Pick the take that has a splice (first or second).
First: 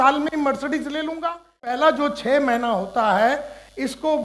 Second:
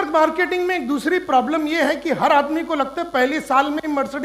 first